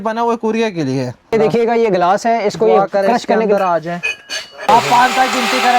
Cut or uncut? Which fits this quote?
cut